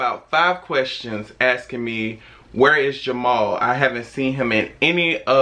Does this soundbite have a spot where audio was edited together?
no; 0 cuts

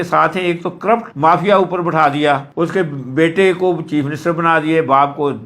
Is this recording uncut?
yes; 0 cuts

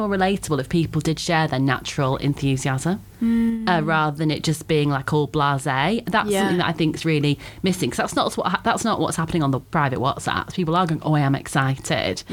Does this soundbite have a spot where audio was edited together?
no; 0 cuts

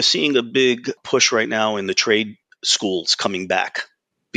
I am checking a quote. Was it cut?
yes; 1 cut; at 1.0 s

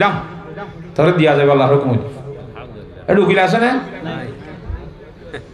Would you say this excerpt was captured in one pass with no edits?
yes; 0 cuts

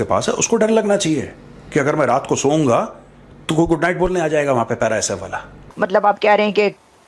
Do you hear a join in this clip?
yes; 1 cut; at 5.6 s

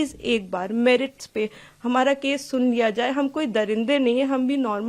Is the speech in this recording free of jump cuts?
yes; 0 cuts

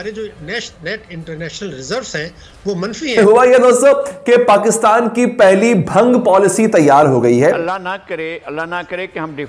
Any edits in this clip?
yes; 2 cuts; at 3.2 s, 7.7 s

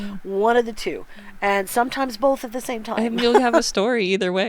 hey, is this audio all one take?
yes; 0 cuts

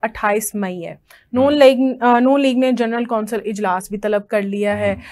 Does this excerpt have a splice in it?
no; 0 cuts

